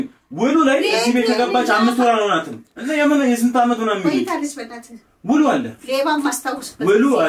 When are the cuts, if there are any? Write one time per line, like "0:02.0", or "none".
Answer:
none